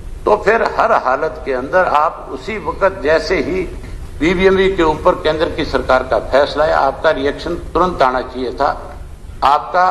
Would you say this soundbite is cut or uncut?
uncut